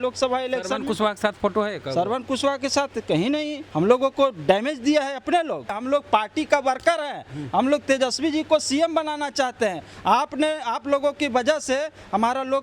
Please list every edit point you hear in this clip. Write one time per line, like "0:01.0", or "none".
0:03.6
0:05.7